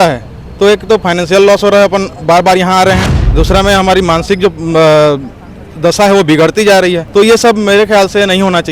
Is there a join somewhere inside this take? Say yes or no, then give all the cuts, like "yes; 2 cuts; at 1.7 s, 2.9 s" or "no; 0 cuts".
yes; 2 cuts; at 3.2 s, 7.0 s